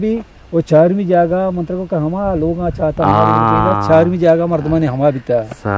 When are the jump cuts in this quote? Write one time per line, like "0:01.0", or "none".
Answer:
none

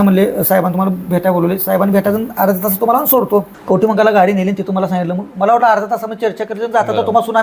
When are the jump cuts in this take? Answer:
0:03.5

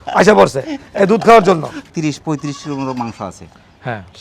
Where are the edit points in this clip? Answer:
0:01.8

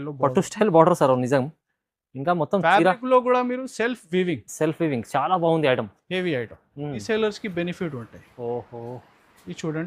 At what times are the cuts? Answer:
0:07.0

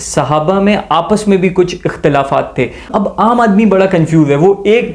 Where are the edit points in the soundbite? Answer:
0:02.9

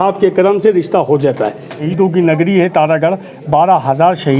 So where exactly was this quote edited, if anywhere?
0:01.8

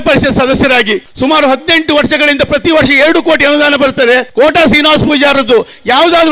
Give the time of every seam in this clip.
0:01.1
0:04.3

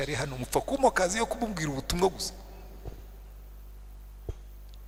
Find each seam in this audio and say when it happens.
none

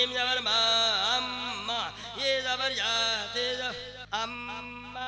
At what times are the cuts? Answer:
0:04.0

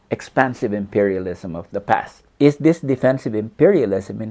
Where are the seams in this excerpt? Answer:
0:02.2

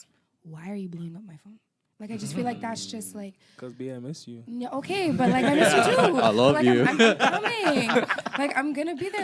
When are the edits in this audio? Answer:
none

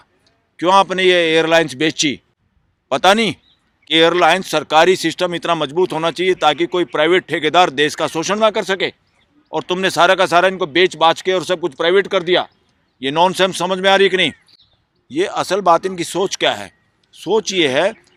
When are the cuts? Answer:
none

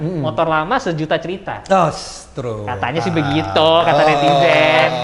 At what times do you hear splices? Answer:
none

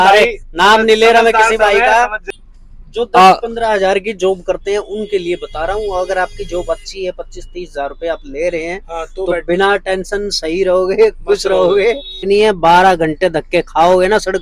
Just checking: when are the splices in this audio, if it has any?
0:02.2
0:12.3

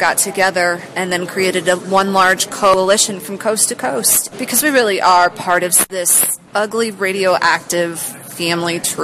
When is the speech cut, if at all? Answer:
0:02.7
0:04.2
0:05.9

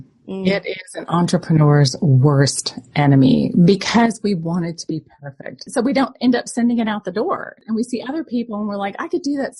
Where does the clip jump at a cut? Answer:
0:05.7
0:07.5

